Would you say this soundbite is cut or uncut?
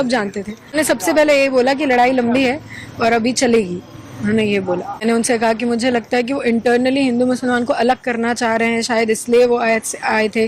cut